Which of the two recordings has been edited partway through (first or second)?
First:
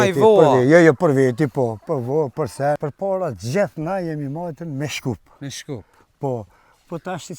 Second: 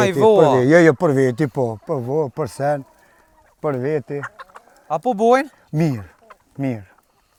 first